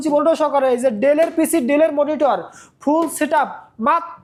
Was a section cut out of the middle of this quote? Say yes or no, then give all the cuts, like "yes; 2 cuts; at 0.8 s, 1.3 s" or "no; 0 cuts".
no; 0 cuts